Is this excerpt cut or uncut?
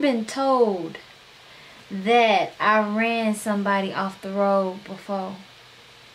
uncut